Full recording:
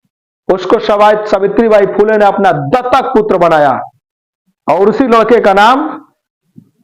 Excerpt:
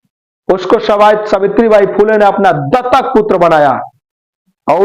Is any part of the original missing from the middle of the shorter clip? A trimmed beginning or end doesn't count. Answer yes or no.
no